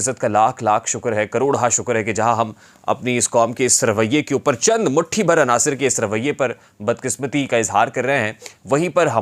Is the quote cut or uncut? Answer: uncut